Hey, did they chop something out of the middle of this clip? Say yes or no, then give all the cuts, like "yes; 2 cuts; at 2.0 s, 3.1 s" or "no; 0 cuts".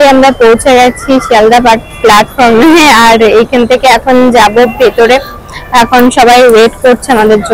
no; 0 cuts